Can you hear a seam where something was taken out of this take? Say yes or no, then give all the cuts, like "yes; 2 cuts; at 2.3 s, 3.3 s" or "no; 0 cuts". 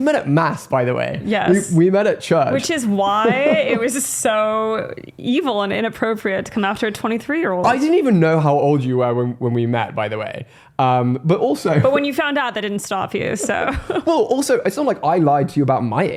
no; 0 cuts